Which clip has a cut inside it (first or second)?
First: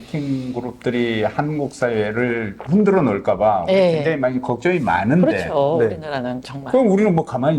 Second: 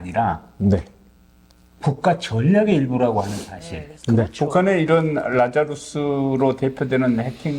second